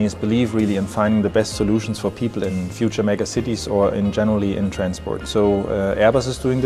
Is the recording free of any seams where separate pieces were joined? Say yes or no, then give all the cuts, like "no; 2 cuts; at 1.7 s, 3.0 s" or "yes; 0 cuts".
no; 1 cut; at 2.5 s